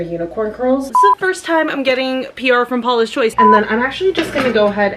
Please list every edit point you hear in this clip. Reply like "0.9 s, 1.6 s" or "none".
0.9 s, 3.3 s